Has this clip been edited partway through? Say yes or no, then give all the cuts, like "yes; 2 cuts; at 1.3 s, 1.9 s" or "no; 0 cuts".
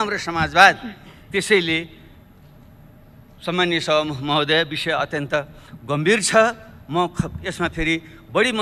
no; 0 cuts